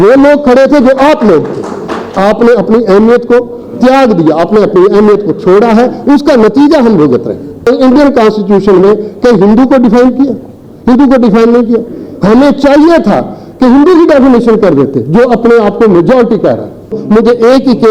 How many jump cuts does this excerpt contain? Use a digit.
3